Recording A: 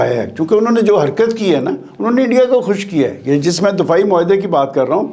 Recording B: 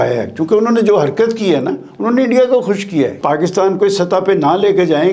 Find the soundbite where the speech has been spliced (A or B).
B